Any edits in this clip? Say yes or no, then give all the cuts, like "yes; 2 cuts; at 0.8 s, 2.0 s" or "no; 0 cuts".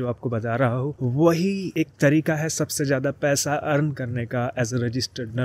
no; 0 cuts